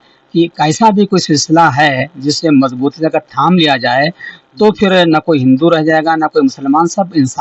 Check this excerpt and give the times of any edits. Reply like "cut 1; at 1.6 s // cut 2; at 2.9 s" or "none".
none

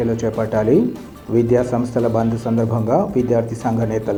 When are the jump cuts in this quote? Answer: none

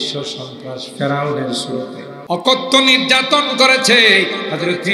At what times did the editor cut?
cut 1; at 2.1 s

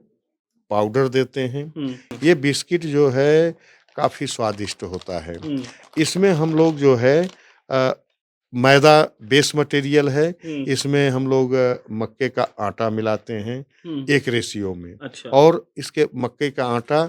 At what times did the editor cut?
cut 1; at 2.0 s

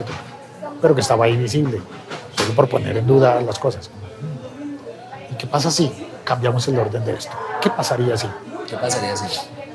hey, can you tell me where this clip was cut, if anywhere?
none

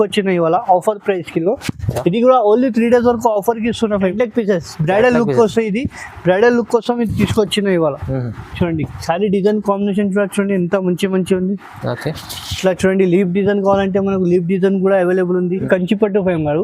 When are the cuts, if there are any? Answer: cut 1; at 4.1 s // cut 2; at 15.6 s

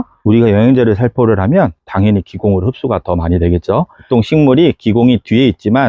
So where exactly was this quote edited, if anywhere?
cut 1; at 4.0 s

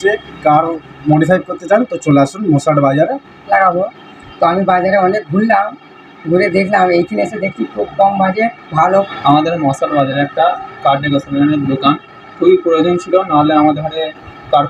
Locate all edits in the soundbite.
cut 1; at 3.4 s // cut 2; at 9.1 s

